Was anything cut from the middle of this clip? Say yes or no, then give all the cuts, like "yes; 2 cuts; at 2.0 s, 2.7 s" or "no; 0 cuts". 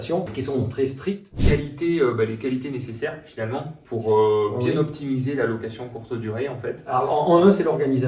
yes; 1 cut; at 1.4 s